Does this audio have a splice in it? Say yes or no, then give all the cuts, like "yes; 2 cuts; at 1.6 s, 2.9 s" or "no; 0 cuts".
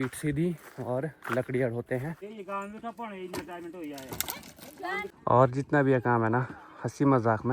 yes; 2 cuts; at 2.3 s, 5.1 s